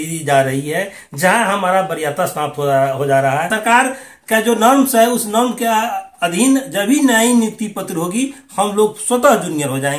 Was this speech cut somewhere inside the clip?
yes; 1 cut; at 3.5 s

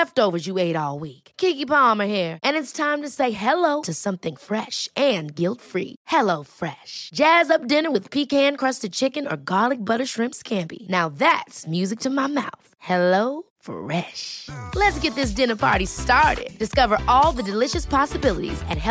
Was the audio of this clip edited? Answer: no; 0 cuts

